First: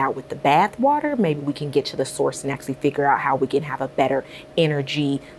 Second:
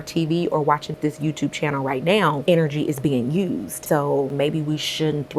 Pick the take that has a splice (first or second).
second